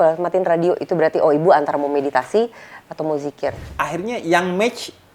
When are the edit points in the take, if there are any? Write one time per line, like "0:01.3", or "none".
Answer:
0:03.7

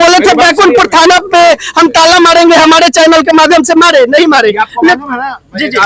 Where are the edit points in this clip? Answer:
none

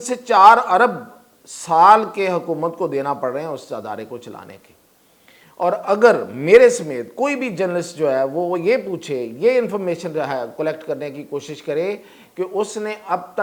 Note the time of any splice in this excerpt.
none

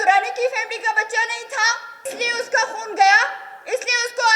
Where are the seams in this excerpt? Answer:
0:02.1

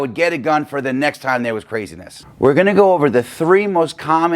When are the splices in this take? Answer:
0:02.2

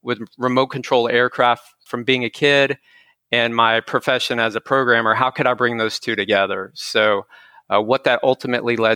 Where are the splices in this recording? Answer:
0:01.9

